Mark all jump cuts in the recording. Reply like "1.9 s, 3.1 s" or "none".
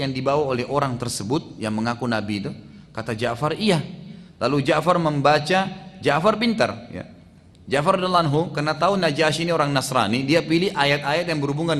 none